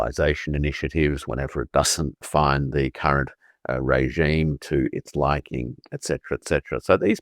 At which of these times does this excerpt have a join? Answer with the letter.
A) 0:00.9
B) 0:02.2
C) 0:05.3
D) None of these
B